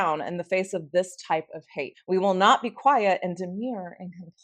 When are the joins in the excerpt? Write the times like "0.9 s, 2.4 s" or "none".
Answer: none